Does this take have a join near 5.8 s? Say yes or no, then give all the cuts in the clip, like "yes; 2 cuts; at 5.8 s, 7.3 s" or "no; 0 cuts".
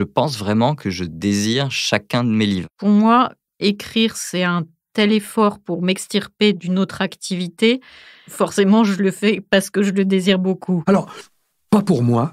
no; 2 cuts; at 2.7 s, 10.8 s